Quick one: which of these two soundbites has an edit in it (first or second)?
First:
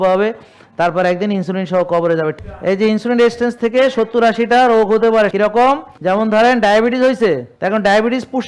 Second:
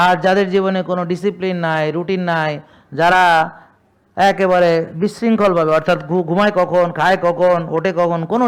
first